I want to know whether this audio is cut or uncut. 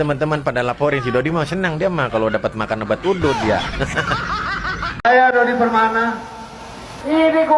cut